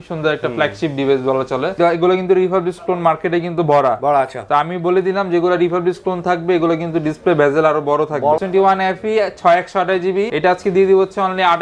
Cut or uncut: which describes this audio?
cut